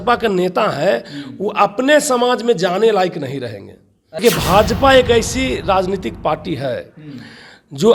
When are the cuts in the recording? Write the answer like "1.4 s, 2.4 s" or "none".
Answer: 4.2 s